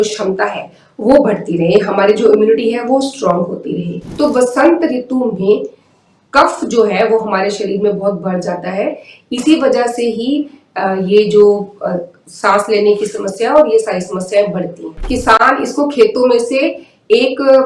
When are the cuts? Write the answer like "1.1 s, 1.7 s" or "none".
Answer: 4.0 s, 15.1 s